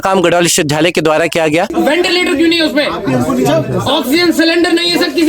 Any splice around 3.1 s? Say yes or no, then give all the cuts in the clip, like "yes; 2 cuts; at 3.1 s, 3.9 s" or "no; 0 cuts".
no; 1 cut; at 1.7 s